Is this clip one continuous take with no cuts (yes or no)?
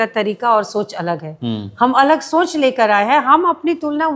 yes